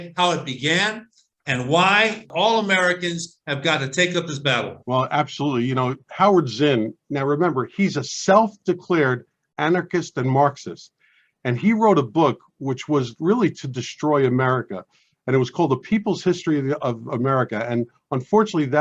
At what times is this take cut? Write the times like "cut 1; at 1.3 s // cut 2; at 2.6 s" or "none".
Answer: cut 1; at 2.2 s // cut 2; at 4.8 s